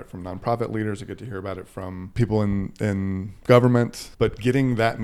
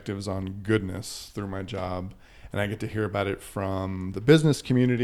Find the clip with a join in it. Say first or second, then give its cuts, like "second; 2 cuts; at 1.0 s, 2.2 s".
first; 2 cuts; at 2.0 s, 4.0 s